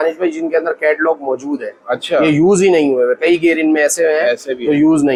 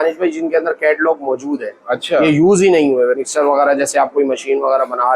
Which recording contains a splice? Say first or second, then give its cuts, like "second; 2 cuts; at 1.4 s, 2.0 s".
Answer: second; 1 cut; at 3.2 s